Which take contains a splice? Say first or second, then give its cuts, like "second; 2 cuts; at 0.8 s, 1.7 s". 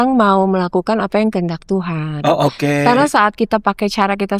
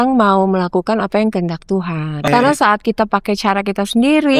second; 1 cut; at 2.3 s